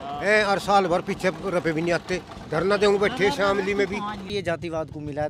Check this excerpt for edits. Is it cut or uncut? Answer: cut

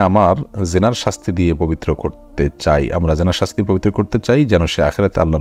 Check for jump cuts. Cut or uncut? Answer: uncut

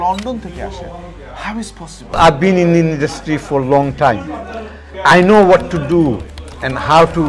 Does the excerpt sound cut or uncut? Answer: cut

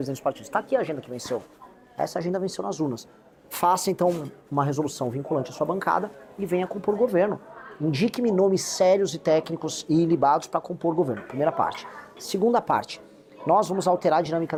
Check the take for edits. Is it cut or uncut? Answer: uncut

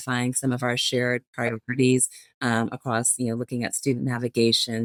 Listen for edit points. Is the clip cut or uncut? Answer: uncut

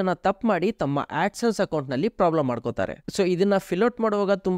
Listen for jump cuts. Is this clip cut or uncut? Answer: uncut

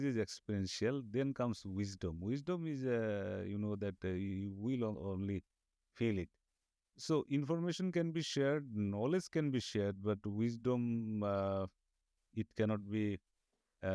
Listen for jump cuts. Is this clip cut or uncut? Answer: uncut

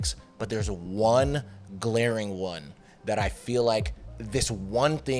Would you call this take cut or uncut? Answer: uncut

